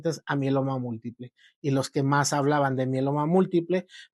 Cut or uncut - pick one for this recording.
uncut